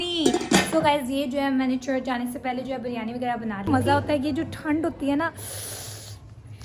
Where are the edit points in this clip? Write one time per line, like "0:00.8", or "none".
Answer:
0:03.7

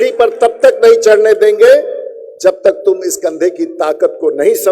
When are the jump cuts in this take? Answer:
none

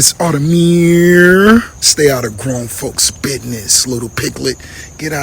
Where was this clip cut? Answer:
0:01.8

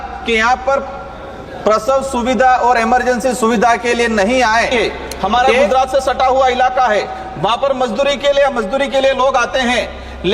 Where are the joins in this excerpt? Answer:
0:04.7

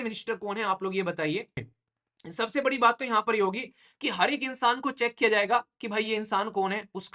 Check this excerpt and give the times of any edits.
0:01.8

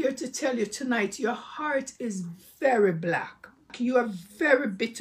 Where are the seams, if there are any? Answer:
0:03.7

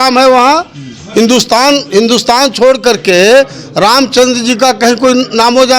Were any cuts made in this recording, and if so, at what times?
none

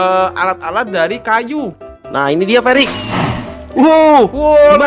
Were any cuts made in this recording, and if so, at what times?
0:01.9

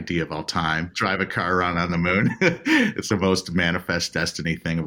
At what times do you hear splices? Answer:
0:00.9
0:03.0

